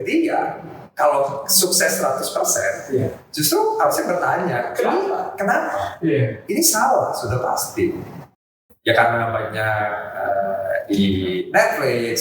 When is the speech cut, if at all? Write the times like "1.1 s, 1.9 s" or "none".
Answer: 8.4 s